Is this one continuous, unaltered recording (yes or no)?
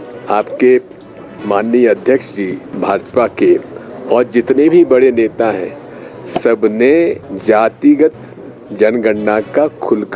no